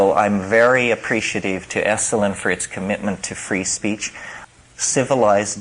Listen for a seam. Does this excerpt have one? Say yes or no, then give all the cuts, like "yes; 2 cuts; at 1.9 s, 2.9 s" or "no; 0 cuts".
yes; 1 cut; at 4.4 s